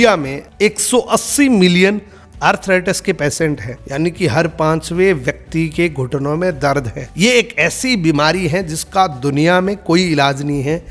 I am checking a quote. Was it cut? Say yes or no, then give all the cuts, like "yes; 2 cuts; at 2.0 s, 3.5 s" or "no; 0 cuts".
no; 0 cuts